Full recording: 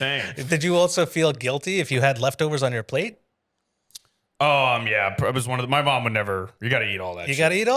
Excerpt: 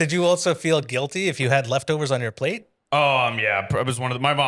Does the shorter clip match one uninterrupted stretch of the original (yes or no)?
no